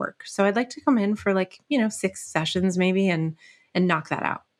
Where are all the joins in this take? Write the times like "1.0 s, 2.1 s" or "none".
none